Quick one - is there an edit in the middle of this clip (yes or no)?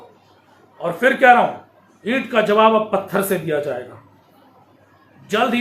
no